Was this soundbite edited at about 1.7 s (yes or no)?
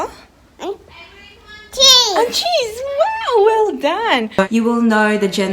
no